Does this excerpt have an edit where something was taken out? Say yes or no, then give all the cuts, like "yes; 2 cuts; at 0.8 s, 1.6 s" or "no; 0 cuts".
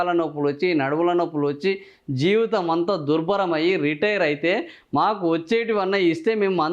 no; 0 cuts